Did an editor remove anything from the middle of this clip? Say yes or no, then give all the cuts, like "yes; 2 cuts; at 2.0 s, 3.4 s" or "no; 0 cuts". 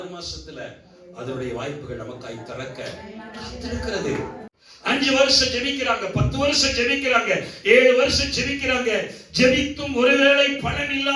yes; 1 cut; at 4.5 s